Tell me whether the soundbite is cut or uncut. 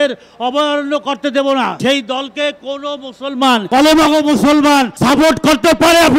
cut